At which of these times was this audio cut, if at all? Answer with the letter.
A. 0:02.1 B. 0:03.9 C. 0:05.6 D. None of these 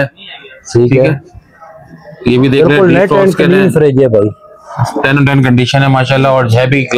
D